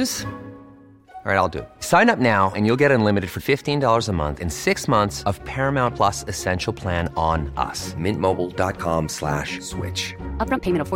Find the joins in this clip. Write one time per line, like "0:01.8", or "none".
none